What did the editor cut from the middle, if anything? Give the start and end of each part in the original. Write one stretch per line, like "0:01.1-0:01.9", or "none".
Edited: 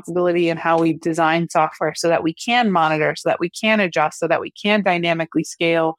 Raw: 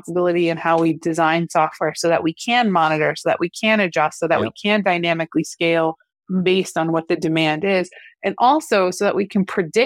none